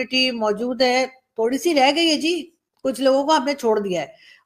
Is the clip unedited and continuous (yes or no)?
yes